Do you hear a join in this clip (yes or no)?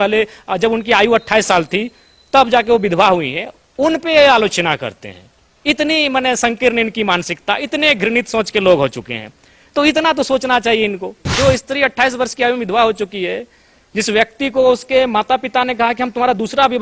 yes